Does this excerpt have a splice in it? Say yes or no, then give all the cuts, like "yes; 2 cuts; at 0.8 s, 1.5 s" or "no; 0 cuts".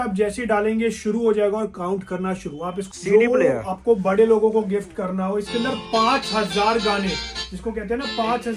yes; 1 cut; at 2.8 s